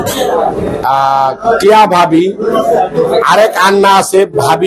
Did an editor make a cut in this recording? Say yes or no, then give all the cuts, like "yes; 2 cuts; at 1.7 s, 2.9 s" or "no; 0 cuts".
no; 0 cuts